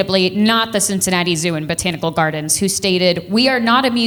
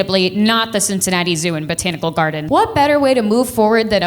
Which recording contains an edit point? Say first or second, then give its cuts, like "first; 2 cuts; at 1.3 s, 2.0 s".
second; 1 cut; at 2.4 s